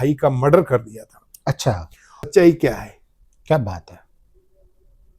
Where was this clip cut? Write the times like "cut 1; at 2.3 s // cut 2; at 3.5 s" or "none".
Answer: cut 1; at 2.3 s